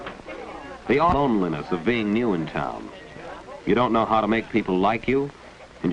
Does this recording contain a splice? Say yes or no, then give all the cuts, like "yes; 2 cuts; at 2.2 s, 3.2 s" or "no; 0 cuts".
yes; 1 cut; at 1.8 s